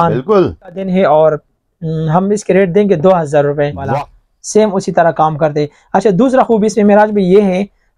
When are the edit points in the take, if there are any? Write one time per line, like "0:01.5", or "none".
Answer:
0:00.8
0:03.8